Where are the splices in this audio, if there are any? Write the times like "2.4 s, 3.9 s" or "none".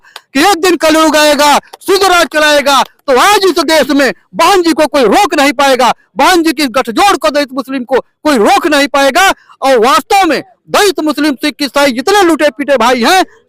none